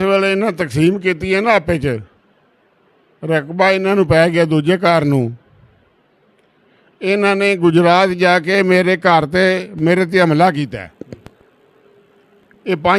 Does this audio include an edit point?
no; 0 cuts

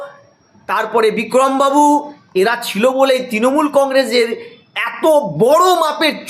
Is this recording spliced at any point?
yes; 1 cut; at 2.2 s

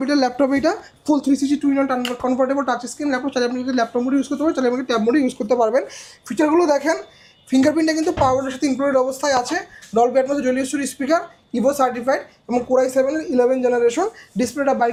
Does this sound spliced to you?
no; 0 cuts

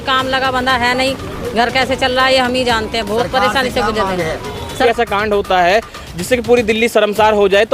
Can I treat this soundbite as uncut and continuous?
no; 1 cut; at 4.8 s

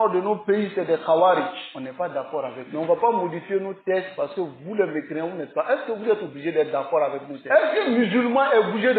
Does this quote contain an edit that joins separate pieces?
yes; 1 cut; at 7.3 s

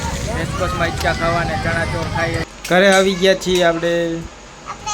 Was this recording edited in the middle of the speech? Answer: yes; 1 cut; at 2.4 s

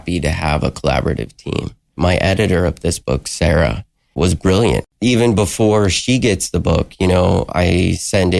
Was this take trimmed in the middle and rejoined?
yes; 3 cuts; at 1.9 s, 4.1 s, 4.9 s

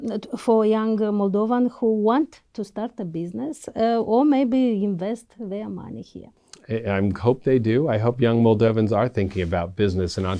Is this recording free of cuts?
yes; 0 cuts

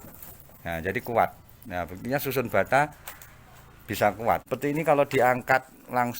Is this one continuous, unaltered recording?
no; 1 cut; at 4.4 s

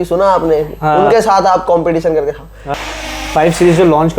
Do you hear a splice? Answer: yes; 1 cut; at 2.6 s

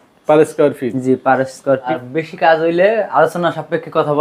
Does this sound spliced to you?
yes; 1 cut; at 2.0 s

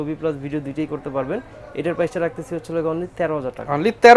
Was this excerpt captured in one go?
yes; 0 cuts

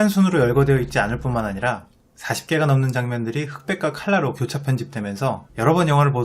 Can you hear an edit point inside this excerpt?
yes; 1 cut; at 5.0 s

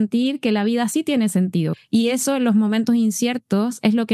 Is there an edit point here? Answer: yes; 1 cut; at 1.7 s

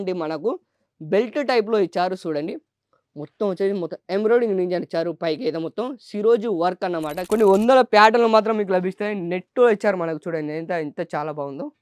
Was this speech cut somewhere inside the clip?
yes; 1 cut; at 7.2 s

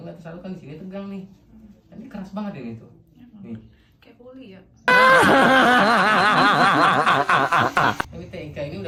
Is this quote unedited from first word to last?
yes; 0 cuts

